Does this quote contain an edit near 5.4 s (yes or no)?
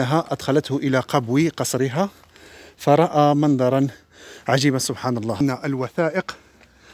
yes